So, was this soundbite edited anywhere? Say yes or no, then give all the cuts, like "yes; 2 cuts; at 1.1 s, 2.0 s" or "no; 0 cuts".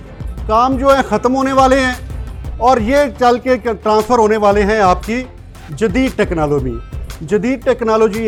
no; 0 cuts